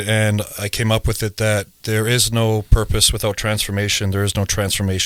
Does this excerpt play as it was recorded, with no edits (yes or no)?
yes